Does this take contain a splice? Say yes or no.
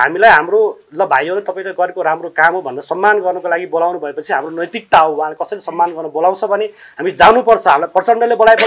no